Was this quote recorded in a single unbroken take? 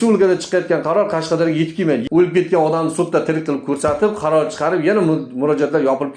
no; 1 cut; at 2.0 s

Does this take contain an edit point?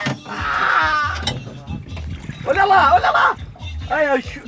no; 0 cuts

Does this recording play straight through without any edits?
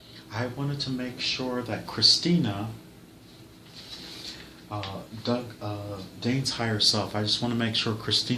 no; 1 cut; at 4.6 s

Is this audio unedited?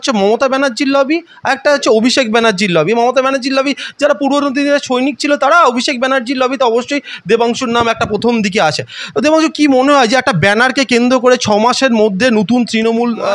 yes; 0 cuts

